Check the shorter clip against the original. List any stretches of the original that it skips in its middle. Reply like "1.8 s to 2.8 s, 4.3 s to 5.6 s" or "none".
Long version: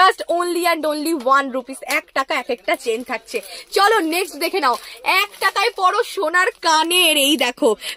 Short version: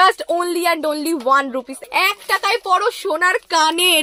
1.8 s to 4.9 s